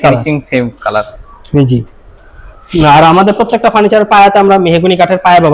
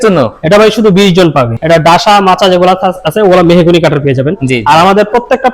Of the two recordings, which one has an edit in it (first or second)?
second